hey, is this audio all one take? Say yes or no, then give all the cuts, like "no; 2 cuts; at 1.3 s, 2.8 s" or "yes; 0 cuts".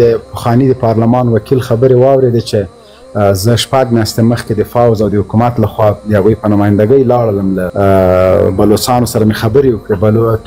yes; 0 cuts